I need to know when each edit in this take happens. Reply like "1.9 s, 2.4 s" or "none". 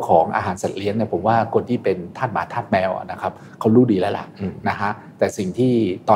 none

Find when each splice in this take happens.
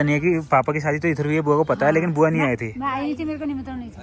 none

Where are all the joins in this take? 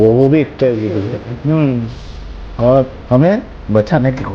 1.2 s

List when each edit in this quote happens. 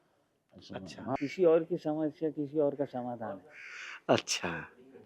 1.1 s

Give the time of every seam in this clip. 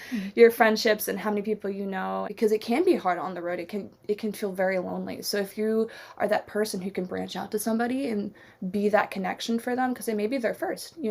2.3 s

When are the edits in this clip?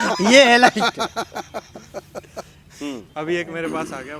3.0 s

